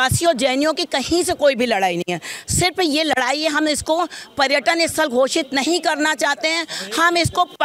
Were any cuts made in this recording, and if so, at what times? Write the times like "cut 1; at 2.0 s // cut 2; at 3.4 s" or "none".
none